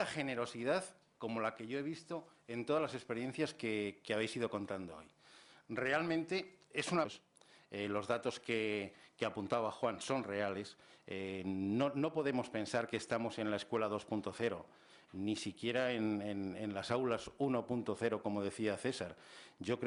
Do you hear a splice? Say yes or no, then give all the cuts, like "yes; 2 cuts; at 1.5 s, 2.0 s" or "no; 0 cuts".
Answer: no; 0 cuts